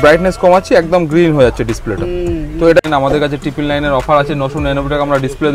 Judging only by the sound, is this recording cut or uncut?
cut